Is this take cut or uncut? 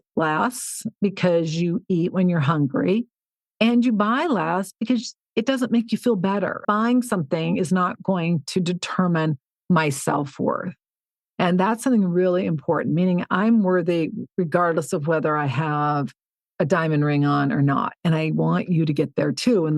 uncut